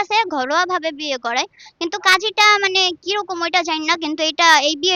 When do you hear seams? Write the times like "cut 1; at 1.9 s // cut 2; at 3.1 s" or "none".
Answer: none